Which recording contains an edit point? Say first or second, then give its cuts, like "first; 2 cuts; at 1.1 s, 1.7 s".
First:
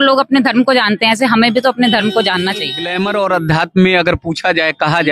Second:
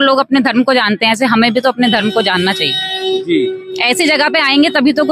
first; 1 cut; at 2.8 s